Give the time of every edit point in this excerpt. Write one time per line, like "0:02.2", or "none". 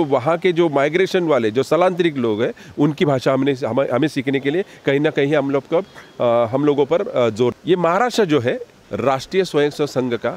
0:07.6
0:08.7